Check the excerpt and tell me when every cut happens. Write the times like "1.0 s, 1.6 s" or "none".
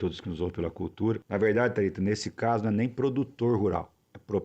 1.2 s